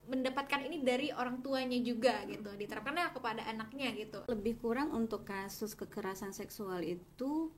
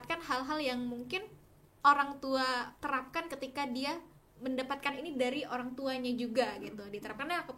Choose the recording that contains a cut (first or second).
first